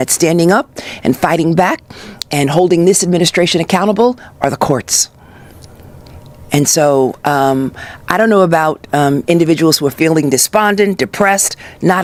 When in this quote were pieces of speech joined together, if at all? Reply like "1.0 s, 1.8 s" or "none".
none